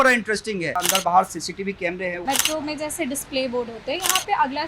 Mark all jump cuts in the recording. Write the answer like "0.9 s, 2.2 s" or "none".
0.8 s, 2.2 s